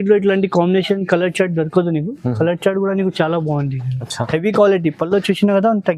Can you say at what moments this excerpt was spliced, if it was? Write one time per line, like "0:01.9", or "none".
0:04.2